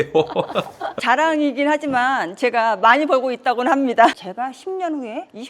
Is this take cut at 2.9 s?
no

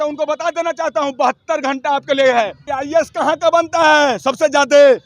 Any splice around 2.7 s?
yes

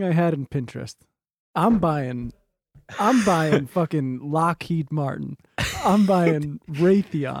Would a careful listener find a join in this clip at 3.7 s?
no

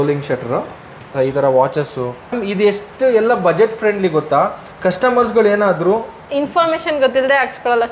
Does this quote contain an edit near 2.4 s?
yes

